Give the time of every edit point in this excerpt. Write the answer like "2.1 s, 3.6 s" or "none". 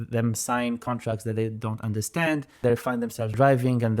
2.9 s